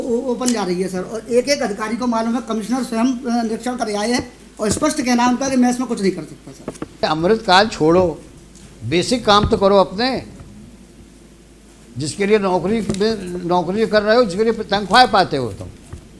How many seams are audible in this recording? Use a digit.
1